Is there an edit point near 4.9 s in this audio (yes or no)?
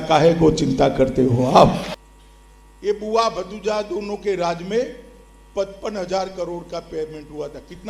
no